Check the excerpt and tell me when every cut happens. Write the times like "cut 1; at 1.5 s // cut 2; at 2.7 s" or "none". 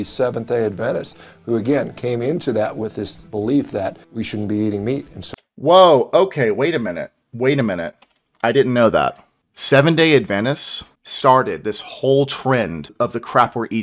cut 1; at 12.9 s